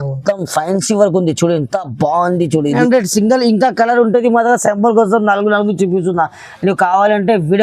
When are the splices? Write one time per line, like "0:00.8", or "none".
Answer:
0:02.7